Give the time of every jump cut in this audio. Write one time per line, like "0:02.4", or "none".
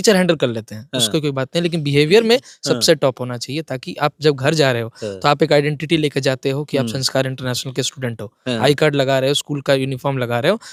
none